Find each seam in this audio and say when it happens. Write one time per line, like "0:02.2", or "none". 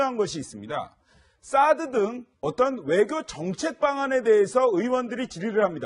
0:02.6